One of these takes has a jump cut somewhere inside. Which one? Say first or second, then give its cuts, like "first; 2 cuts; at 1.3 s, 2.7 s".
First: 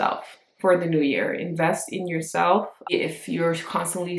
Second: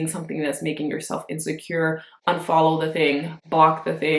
first; 1 cut; at 2.9 s